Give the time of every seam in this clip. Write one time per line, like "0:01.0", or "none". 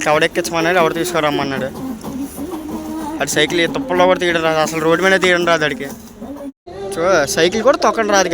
0:06.6

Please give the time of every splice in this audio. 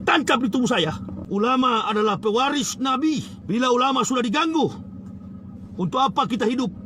0:01.1
0:03.3

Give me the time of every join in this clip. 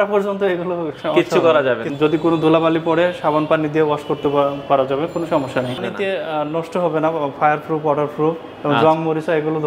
0:01.9
0:05.8

